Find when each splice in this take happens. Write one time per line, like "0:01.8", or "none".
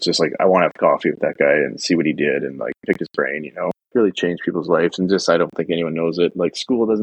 0:03.8